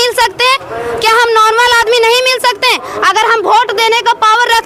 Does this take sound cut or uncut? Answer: uncut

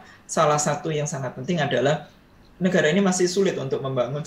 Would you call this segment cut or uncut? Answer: uncut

